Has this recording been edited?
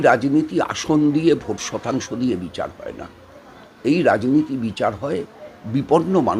no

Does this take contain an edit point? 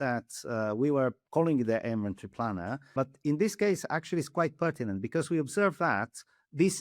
yes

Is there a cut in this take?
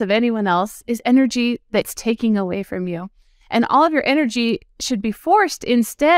yes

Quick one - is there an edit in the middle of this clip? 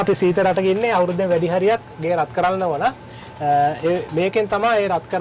no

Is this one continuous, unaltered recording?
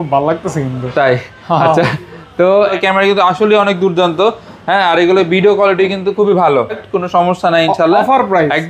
no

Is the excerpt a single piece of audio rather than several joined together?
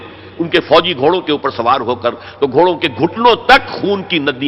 yes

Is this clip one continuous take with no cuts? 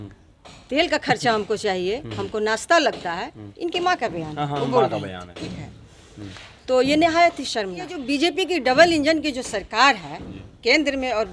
no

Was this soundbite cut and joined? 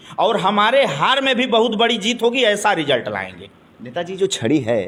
no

